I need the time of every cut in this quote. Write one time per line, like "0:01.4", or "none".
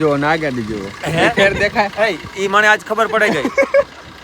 none